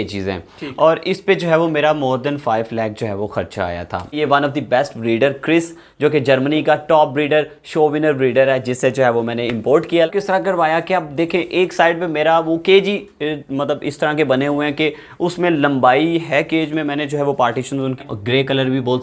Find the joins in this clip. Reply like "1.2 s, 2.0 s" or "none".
4.2 s, 10.1 s, 18.0 s